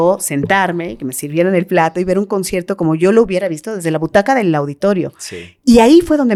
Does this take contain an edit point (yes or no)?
no